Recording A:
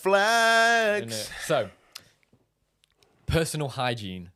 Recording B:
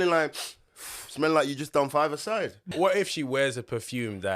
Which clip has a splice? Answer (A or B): B